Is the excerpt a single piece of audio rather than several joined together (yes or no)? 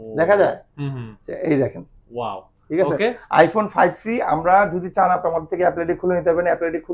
yes